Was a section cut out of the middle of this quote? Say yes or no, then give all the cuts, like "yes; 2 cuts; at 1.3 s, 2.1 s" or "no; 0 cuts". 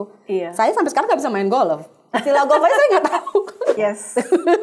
yes; 1 cut; at 3.6 s